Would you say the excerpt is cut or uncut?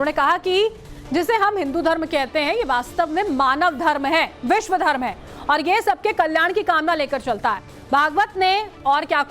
cut